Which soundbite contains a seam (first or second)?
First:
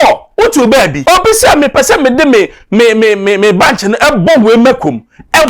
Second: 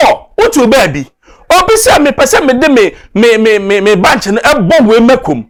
first